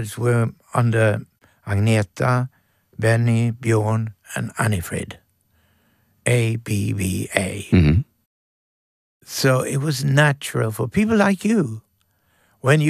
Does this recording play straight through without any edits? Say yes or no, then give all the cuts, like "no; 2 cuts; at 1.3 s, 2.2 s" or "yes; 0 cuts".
yes; 0 cuts